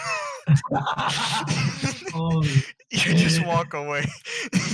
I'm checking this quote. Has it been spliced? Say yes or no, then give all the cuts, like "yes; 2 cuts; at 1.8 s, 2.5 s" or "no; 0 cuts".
no; 0 cuts